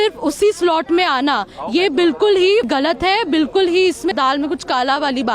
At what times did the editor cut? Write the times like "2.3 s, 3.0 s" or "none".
2.7 s, 4.1 s